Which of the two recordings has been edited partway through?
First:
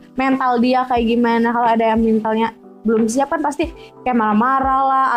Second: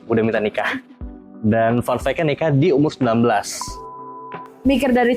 second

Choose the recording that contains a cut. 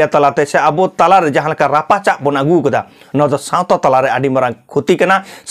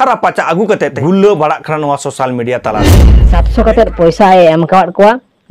second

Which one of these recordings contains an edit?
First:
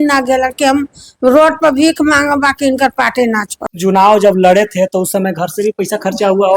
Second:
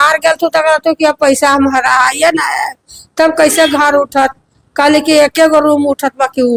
first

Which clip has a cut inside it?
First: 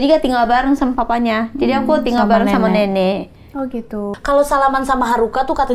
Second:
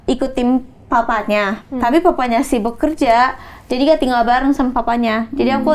first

